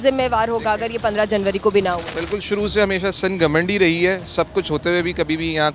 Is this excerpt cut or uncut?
uncut